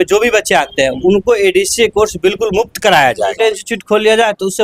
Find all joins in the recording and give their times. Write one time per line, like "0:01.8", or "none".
0:03.3